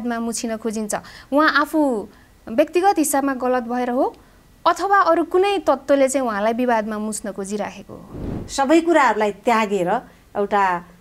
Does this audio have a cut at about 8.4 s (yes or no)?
yes